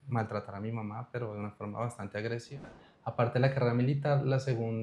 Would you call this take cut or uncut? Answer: cut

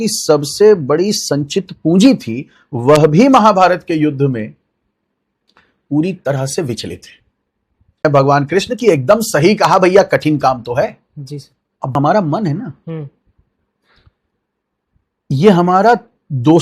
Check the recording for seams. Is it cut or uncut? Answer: cut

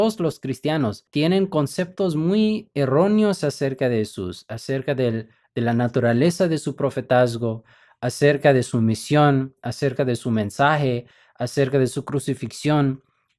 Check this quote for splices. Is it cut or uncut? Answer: cut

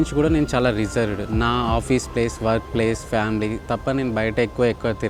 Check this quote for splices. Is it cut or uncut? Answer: uncut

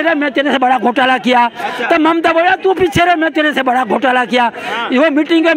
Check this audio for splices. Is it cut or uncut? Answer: uncut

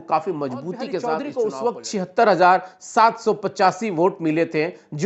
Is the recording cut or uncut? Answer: cut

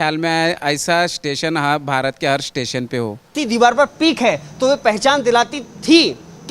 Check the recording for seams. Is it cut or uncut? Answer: cut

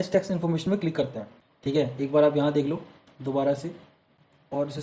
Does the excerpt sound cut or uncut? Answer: cut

